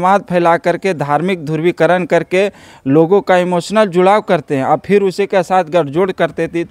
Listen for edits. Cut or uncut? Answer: uncut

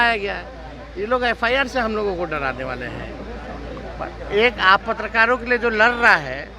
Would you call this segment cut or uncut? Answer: uncut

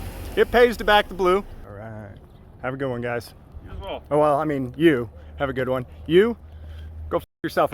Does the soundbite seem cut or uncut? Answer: cut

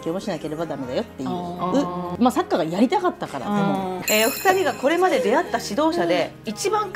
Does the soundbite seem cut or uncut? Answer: cut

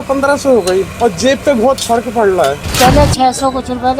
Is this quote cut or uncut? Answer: cut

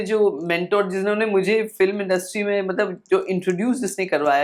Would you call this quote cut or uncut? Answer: uncut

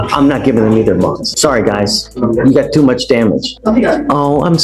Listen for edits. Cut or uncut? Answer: cut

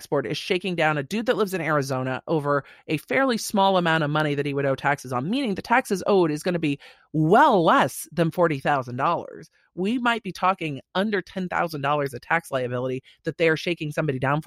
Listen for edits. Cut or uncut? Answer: uncut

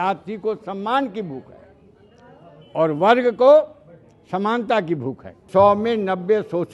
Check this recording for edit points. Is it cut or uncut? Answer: cut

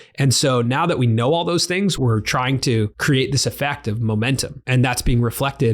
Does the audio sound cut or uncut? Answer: cut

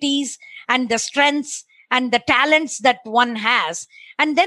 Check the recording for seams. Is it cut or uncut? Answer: uncut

